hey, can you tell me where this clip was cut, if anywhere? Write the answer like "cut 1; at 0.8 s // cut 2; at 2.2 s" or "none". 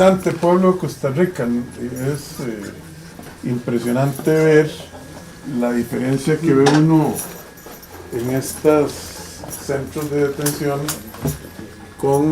none